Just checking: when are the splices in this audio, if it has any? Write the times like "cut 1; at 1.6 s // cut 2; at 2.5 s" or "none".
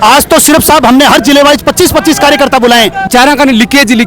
cut 1; at 3.0 s